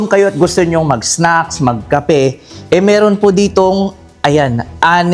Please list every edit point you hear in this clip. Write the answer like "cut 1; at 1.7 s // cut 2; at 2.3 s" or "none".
none